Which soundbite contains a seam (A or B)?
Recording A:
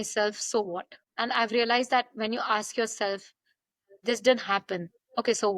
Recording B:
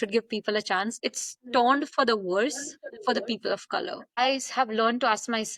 B